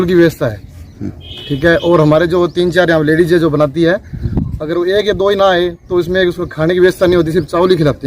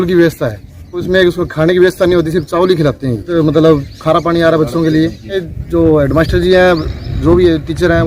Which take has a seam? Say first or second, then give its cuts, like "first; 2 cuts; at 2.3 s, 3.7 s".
second; 3 cuts; at 1.0 s, 3.2 s, 5.4 s